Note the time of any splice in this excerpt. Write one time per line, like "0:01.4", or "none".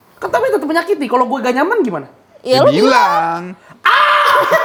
none